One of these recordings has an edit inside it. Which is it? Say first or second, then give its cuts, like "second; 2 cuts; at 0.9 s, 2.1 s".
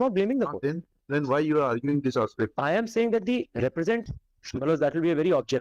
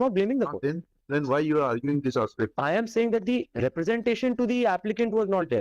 first; 1 cut; at 4.0 s